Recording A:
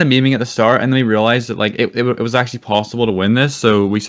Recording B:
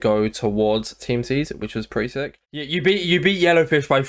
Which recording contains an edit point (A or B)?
B